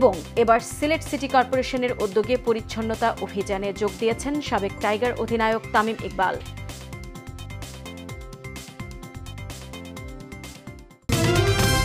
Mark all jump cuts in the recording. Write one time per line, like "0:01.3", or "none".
0:10.9